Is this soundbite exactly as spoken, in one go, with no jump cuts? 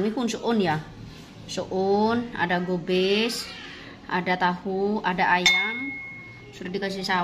yes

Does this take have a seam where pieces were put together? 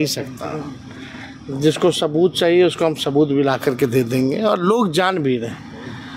no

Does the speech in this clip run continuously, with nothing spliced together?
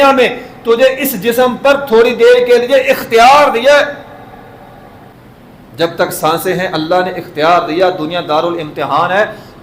no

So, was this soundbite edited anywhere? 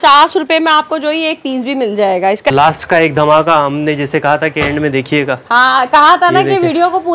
yes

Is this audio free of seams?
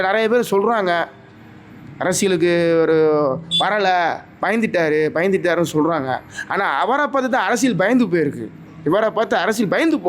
yes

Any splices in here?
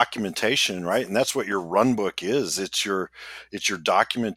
no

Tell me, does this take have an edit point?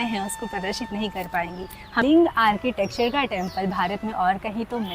yes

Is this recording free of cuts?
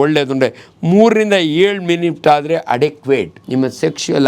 no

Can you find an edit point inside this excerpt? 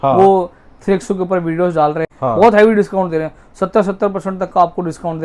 yes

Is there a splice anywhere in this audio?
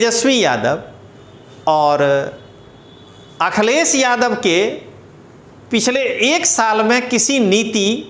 no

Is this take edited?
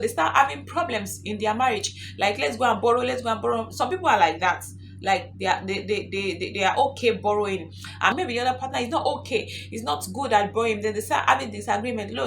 yes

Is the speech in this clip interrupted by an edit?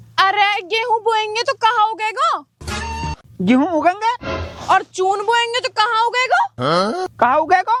no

